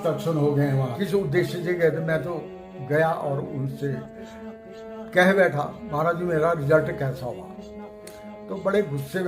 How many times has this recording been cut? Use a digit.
1